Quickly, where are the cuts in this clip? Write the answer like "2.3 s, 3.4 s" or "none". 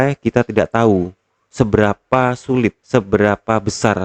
2.9 s